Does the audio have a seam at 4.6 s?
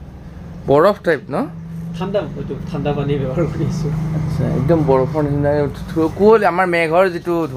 no; 0 cuts

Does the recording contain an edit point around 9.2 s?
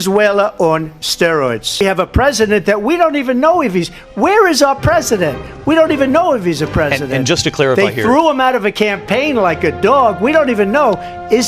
no; 1 cut; at 1.8 s

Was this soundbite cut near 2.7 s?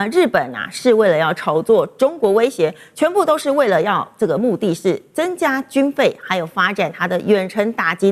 no; 0 cuts

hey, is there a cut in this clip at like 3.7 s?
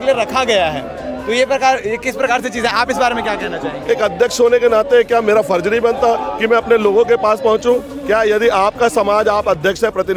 no; 0 cuts

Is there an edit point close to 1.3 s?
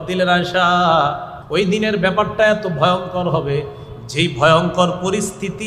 yes; 1 cut; at 1.3 s

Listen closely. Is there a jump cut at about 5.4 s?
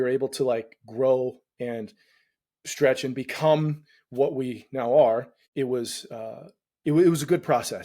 yes; 1 cut; at 5.4 s

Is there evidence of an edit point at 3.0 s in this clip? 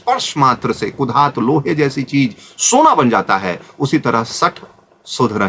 no; 0 cuts

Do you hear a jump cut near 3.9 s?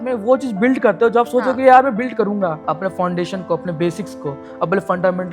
no; 1 cut; at 2.6 s

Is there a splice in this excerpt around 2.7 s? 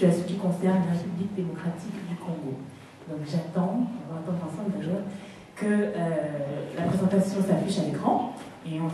no; 0 cuts

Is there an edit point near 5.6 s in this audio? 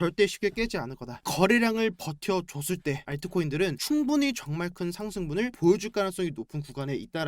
no; 1 cut; at 1.3 s

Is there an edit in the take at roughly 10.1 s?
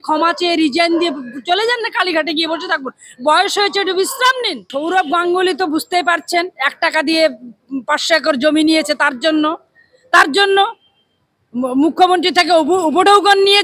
no; 1 cut; at 4.7 s

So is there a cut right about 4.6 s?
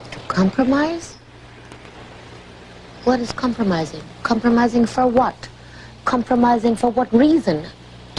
yes; 1 cut; at 4.6 s

